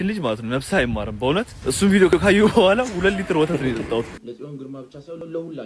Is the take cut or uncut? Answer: cut